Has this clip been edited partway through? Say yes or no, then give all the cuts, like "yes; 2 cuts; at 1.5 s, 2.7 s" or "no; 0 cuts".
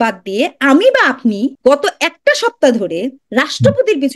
yes; 2 cuts; at 1.6 s, 3.2 s